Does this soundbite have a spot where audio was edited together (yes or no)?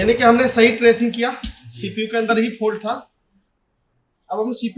no